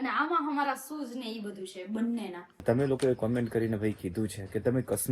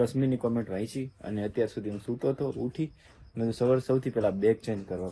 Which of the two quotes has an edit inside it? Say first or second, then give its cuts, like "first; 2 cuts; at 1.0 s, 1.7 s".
first; 1 cut; at 2.6 s